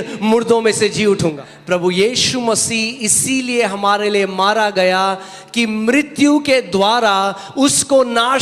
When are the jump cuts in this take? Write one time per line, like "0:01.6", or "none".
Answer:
0:01.5

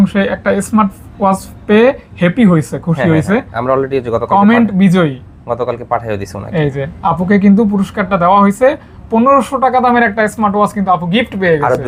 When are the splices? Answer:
none

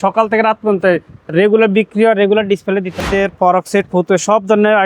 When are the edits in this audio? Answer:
0:03.0

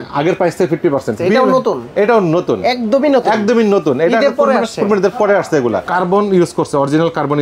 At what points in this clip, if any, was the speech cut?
0:01.2
0:05.8

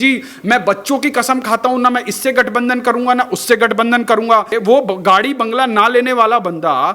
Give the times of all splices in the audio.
0:04.5

